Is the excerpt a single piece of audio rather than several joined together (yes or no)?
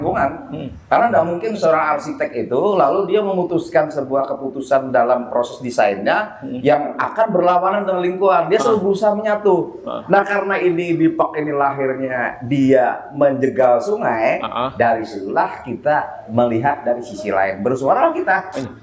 yes